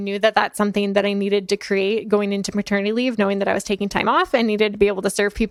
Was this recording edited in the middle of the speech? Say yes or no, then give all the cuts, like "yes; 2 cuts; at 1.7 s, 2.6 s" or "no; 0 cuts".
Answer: no; 0 cuts